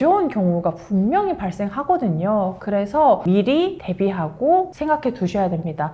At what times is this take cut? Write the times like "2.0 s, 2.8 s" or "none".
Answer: 3.2 s